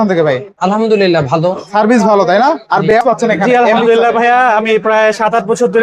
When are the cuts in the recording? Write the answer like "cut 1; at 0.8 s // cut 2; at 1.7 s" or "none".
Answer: cut 1; at 2.9 s